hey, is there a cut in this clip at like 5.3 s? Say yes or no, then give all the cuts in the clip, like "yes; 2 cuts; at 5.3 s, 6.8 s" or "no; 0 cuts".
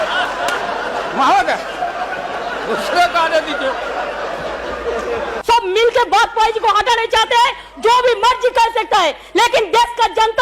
yes; 1 cut; at 5.3 s